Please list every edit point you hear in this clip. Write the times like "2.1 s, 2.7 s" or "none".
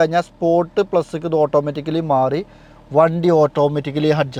none